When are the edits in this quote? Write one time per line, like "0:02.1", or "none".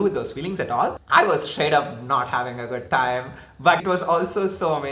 0:01.0
0:03.8

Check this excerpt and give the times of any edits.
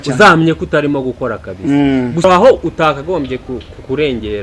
0:02.2

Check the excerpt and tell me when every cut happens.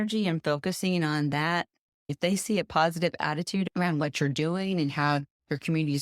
0:02.1
0:03.7

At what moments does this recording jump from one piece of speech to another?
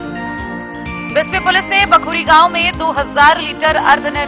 0:01.0

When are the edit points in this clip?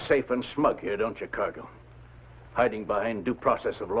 0:02.8

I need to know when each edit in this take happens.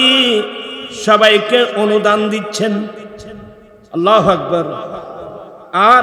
none

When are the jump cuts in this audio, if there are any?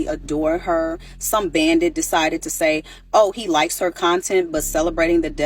0:01.1
0:02.9

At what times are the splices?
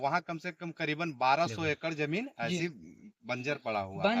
none

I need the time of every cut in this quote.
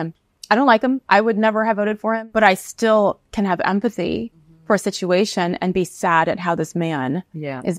0:02.1

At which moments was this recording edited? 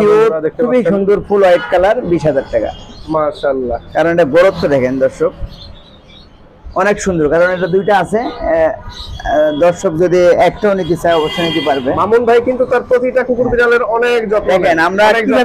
0:03.0

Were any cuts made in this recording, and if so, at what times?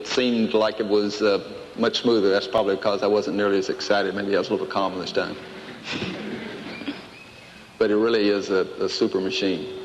0:01.1

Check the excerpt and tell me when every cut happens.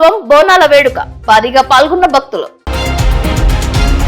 0:02.5

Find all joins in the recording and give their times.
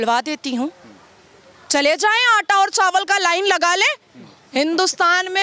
none

